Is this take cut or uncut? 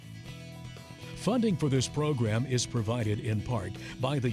cut